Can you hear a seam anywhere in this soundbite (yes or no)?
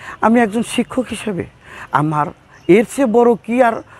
no